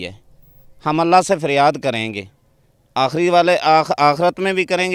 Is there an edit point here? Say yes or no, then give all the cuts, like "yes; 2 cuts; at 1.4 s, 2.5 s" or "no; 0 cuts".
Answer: no; 0 cuts